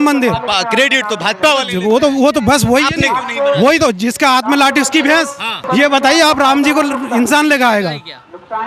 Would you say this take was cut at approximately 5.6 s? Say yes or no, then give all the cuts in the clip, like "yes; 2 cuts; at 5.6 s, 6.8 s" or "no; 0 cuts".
yes; 1 cut; at 5.6 s